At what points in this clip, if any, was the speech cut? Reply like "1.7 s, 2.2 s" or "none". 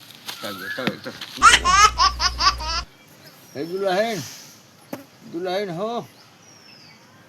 1.3 s